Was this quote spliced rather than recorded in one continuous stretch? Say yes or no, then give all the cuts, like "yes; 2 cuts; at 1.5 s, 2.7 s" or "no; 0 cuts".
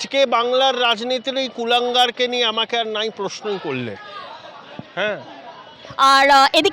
no; 0 cuts